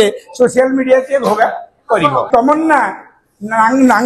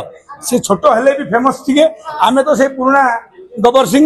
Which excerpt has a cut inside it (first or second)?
first